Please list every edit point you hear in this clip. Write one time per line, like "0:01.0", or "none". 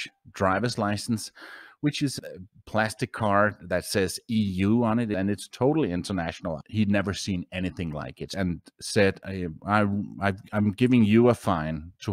0:05.1
0:06.6
0:08.3